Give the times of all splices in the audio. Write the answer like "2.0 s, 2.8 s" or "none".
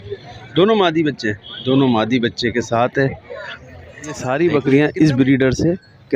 4.2 s